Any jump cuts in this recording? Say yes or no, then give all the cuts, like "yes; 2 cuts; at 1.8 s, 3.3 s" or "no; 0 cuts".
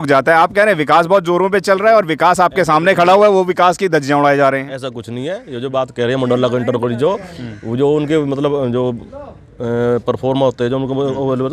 no; 0 cuts